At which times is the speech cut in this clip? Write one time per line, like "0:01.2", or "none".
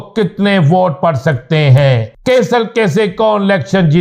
0:02.1